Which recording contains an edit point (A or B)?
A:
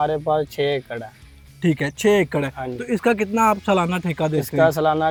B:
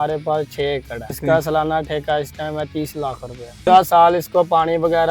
B